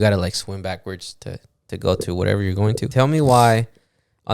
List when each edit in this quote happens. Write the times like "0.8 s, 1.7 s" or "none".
2.8 s

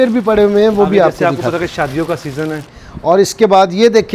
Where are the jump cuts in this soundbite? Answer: 2.6 s

